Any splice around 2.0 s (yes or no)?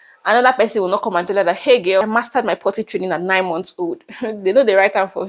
yes